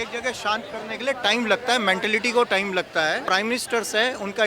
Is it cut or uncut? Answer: cut